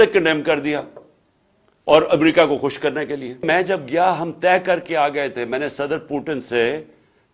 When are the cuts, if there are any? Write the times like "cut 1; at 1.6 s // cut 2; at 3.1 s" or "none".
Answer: cut 1; at 3.4 s